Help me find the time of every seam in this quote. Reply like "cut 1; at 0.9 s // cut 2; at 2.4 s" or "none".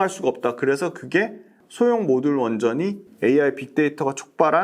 cut 1; at 1.6 s // cut 2; at 3.0 s